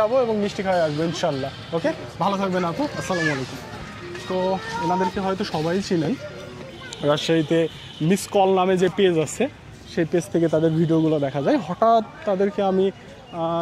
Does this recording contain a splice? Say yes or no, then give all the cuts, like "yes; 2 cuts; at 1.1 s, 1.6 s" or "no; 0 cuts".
no; 0 cuts